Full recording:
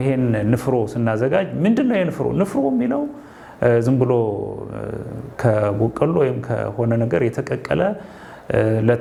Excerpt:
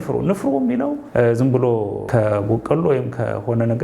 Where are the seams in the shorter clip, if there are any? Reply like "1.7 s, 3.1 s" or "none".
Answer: 1.0 s, 2.0 s